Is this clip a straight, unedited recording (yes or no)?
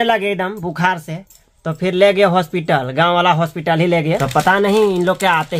no